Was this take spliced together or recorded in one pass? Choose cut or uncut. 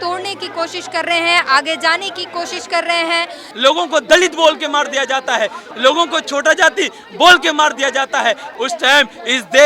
cut